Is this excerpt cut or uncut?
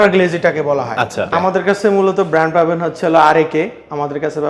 cut